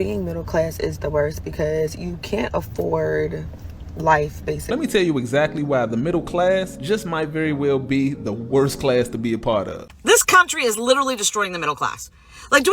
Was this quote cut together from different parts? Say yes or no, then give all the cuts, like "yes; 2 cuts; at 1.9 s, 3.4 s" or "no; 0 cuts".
yes; 2 cuts; at 4.6 s, 9.8 s